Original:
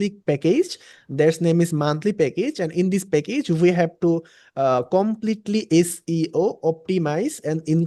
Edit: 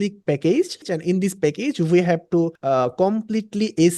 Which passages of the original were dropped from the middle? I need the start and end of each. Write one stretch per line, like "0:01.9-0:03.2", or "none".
0:00.9-0:02.6
0:04.3-0:04.5